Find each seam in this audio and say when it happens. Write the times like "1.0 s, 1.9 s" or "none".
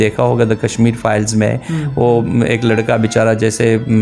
none